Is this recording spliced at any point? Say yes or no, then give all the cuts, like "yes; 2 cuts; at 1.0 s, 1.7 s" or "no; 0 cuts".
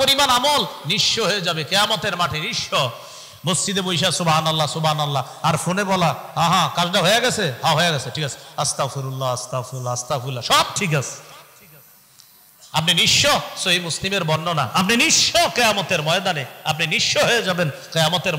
no; 0 cuts